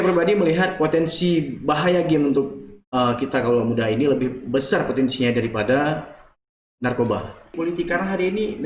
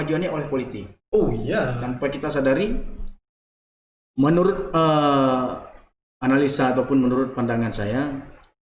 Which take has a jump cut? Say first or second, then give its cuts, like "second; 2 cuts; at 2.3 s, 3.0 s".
first; 1 cut; at 7.5 s